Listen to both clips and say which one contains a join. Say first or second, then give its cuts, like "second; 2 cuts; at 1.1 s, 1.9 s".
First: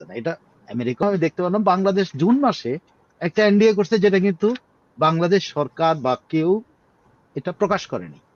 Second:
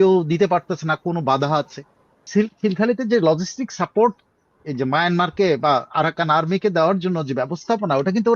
second; 1 cut; at 2.3 s